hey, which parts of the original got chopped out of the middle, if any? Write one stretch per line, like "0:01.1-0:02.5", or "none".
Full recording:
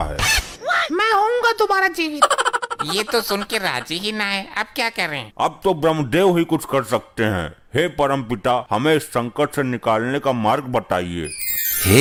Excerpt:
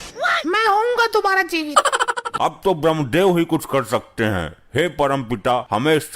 0:02.7-0:05.3